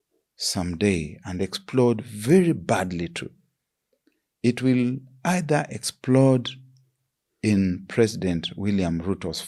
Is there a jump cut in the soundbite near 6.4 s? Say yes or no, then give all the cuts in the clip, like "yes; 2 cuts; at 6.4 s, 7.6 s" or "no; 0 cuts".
no; 0 cuts